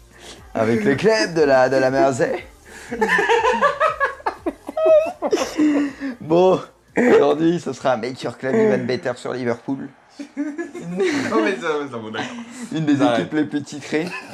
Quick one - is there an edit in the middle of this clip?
no; 0 cuts

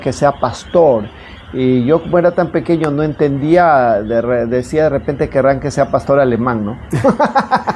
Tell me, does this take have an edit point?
no; 0 cuts

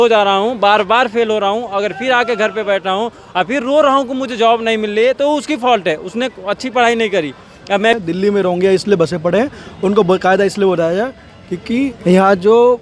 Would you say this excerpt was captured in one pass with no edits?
no; 1 cut; at 7.9 s

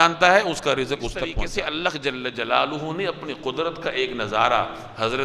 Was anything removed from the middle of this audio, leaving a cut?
yes; 1 cut; at 1.4 s

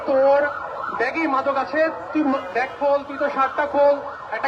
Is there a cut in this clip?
no; 0 cuts

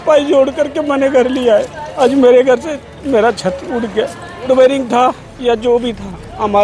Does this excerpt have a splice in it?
yes; 2 cuts; at 1.8 s, 4.5 s

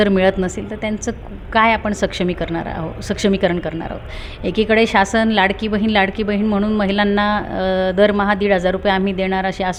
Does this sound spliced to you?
no; 0 cuts

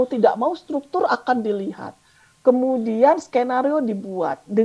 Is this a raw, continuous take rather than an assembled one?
yes; 0 cuts

